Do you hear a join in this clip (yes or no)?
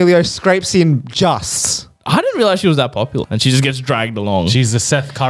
yes